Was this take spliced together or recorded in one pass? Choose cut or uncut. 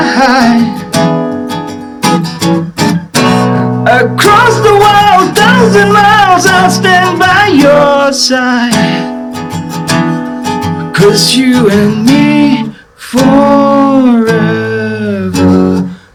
uncut